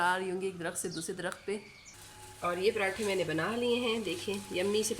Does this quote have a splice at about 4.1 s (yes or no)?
no